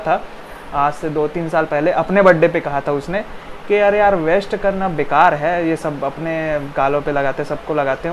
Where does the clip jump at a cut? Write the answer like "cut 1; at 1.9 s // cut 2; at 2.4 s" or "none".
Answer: none